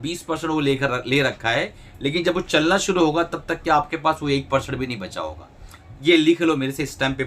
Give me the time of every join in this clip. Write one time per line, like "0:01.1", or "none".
none